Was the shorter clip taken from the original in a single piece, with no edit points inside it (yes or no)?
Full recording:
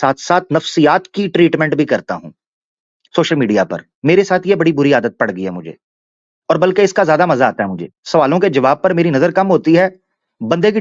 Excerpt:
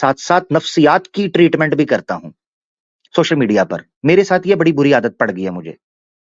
yes